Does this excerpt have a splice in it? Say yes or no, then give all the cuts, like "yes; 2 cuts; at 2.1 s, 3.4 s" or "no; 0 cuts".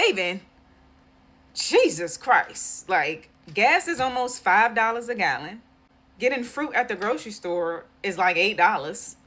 no; 0 cuts